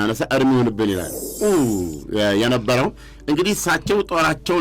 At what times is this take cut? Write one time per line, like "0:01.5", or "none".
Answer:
0:01.3